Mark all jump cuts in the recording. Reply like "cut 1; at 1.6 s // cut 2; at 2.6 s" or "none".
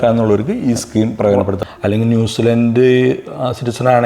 cut 1; at 1.6 s